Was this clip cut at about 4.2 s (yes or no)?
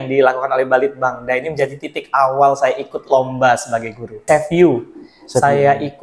yes